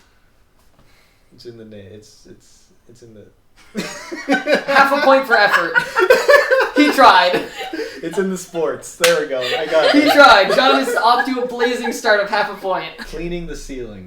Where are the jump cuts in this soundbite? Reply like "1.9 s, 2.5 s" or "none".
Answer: 13.0 s